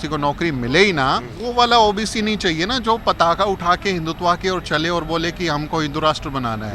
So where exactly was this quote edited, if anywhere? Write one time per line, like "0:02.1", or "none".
0:01.3